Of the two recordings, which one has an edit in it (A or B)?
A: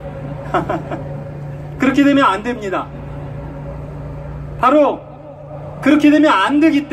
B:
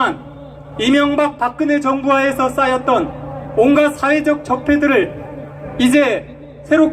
B